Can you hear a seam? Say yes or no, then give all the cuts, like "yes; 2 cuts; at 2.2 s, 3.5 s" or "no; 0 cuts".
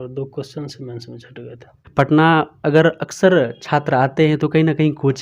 yes; 1 cut; at 1.8 s